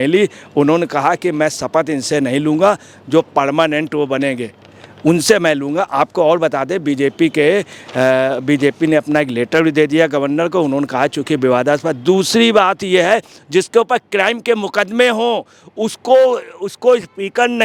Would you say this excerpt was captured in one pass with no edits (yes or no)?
yes